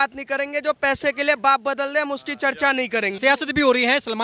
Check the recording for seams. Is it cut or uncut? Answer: cut